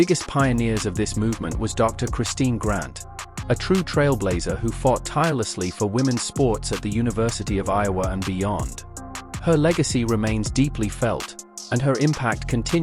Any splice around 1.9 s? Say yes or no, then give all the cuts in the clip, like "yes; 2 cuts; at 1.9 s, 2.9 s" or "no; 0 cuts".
yes; 1 cut; at 1.9 s